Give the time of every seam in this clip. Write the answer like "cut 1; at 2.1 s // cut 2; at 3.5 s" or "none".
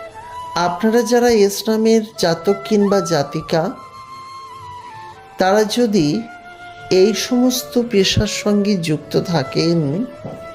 cut 1; at 3.8 s // cut 2; at 5.3 s

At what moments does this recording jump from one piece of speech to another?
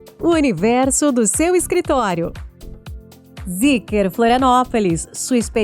cut 1; at 2.9 s

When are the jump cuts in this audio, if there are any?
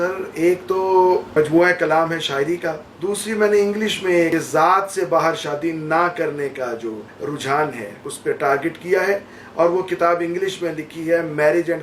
cut 1; at 1.3 s // cut 2; at 2.9 s // cut 3; at 4.3 s // cut 4; at 7.1 s // cut 5; at 8.1 s

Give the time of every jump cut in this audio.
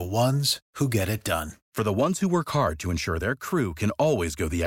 cut 1; at 1.5 s

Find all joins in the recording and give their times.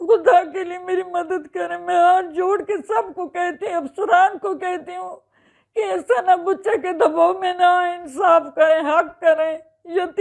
none

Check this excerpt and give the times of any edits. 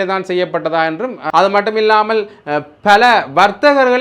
cut 1; at 1.2 s

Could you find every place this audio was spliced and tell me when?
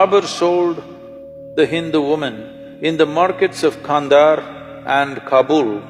none

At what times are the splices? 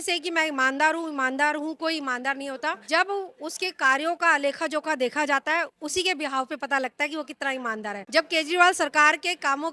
none

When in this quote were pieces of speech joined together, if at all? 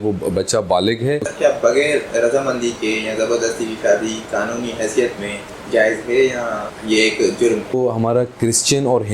cut 1; at 1.3 s // cut 2; at 5.5 s // cut 3; at 6.7 s // cut 4; at 7.7 s

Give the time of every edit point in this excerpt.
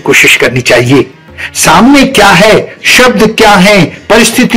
none

